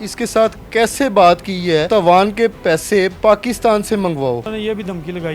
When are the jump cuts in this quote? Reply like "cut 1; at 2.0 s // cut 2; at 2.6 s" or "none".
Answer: cut 1; at 1.9 s // cut 2; at 4.5 s